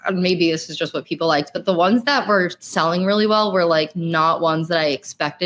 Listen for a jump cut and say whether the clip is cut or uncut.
uncut